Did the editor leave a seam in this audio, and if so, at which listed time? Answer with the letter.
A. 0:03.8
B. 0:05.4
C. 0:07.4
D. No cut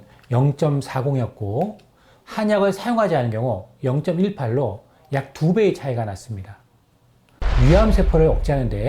C